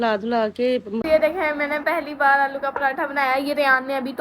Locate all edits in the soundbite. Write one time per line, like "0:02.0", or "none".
0:01.0